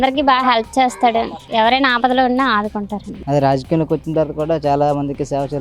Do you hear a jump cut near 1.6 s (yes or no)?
no